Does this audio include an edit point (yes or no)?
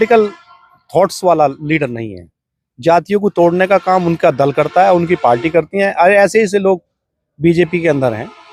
no